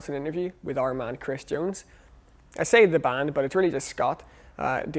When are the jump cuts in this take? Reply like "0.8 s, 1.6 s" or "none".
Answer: none

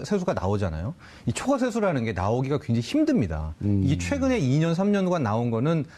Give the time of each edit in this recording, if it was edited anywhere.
2.8 s

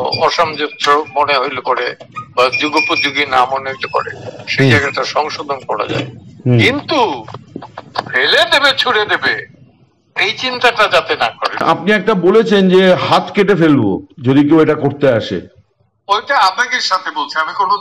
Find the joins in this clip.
11.6 s

